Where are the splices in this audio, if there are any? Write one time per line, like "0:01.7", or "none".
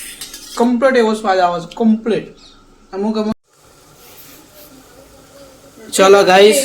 0:03.3

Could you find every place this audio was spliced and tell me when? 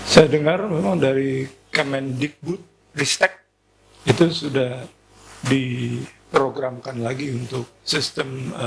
none

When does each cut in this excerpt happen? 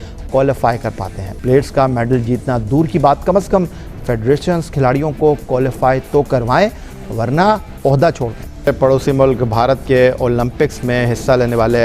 0:01.3
0:08.7

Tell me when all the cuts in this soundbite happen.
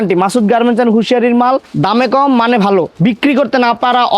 0:01.7
0:02.9

